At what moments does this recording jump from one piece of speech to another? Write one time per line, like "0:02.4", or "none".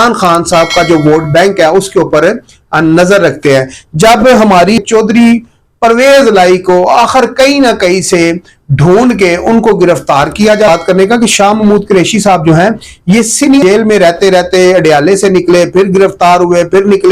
0:04.8
0:10.7
0:13.6